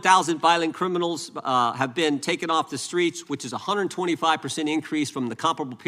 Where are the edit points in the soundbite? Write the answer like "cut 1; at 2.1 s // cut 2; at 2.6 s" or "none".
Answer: none